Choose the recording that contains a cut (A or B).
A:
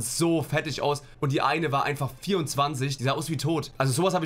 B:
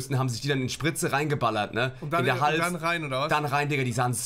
A